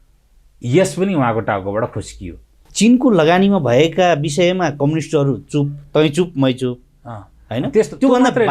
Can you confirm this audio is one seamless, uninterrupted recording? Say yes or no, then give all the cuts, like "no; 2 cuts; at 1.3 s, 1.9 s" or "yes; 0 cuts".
no; 1 cut; at 2.6 s